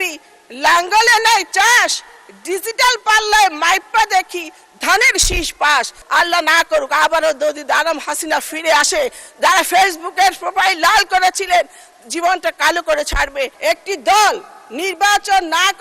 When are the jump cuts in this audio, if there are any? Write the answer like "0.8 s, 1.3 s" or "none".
6.0 s, 13.5 s